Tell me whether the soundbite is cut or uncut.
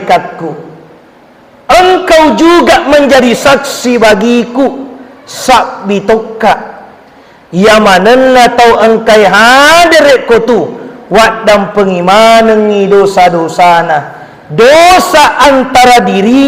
uncut